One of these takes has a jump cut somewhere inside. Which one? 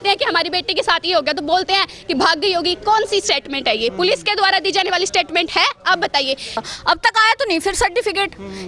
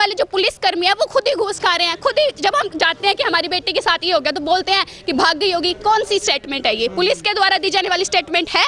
first; 1 cut; at 6.6 s

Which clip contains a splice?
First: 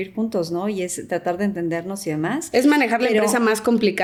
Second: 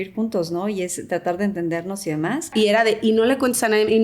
second; 1 cut; at 2.5 s

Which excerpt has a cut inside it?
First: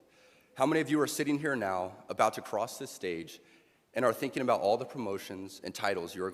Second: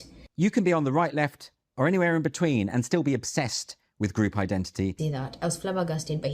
second; 1 cut; at 5.0 s

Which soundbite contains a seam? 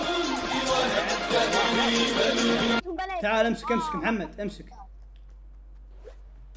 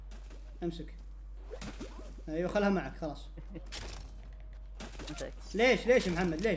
first; 1 cut; at 2.8 s

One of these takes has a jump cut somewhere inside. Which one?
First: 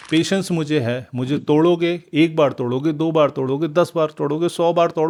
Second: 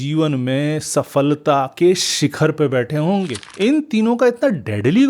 second; 1 cut; at 3.4 s

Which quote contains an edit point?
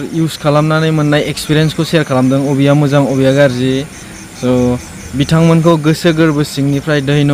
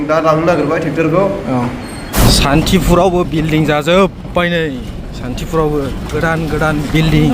second; 1 cut; at 2.1 s

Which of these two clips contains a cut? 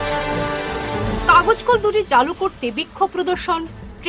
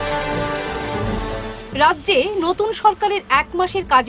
first; 1 cut; at 0.9 s

